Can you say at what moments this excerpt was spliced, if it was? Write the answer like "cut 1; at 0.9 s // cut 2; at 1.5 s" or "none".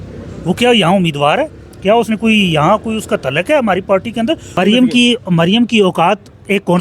cut 1; at 4.6 s